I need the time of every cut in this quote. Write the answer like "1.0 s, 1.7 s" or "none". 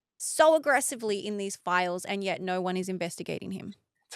2.4 s